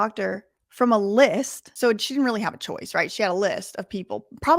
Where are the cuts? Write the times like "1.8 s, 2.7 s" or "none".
1.6 s